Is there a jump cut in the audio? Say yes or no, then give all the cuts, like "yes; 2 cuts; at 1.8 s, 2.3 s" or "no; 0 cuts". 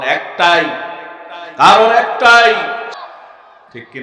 yes; 1 cut; at 2.9 s